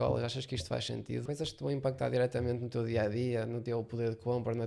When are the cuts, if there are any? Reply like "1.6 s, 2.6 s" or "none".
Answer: 1.2 s, 3.6 s